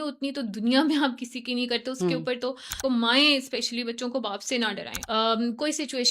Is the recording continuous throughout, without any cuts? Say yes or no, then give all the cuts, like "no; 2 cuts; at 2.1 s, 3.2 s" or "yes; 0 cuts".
no; 2 cuts; at 2.8 s, 4.9 s